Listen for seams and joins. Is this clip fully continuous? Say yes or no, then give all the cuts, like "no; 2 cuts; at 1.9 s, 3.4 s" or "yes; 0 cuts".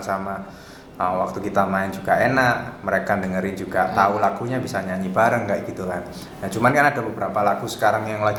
yes; 0 cuts